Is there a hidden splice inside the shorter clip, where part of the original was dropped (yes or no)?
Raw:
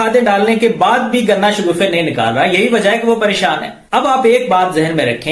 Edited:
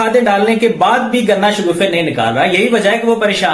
no